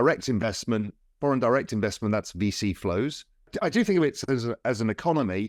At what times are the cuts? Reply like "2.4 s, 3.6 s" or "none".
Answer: 3.5 s